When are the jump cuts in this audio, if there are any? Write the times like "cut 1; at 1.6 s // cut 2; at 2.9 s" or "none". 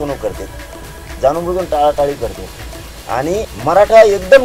cut 1; at 3.5 s